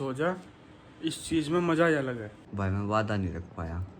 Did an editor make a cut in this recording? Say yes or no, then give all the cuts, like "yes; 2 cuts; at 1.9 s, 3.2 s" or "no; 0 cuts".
yes; 1 cut; at 2.4 s